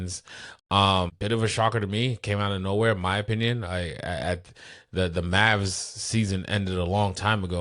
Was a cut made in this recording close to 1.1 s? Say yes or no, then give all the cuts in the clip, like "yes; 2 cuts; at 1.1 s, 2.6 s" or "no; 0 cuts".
yes; 1 cut; at 1.1 s